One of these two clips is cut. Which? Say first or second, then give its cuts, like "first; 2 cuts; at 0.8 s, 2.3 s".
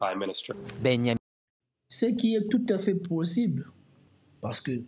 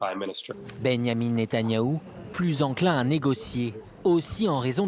second; 1 cut; at 1.1 s